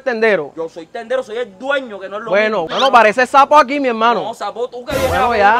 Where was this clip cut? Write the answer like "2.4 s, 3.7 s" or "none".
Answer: none